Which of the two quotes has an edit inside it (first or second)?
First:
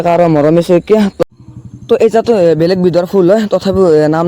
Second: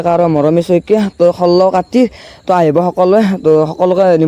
first